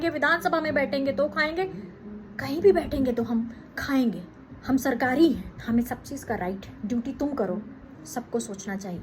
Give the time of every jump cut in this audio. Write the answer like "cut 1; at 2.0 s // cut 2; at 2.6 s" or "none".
cut 1; at 4.5 s // cut 2; at 5.5 s // cut 3; at 6.7 s // cut 4; at 7.9 s